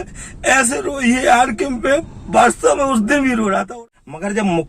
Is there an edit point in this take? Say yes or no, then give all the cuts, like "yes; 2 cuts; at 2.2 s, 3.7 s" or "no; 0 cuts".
yes; 1 cut; at 3.7 s